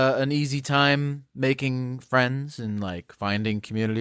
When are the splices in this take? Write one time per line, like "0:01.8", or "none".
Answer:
none